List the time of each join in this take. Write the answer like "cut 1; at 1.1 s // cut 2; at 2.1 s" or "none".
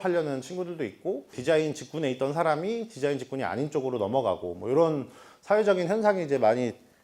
cut 1; at 1.3 s